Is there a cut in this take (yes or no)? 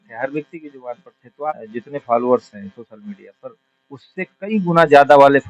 yes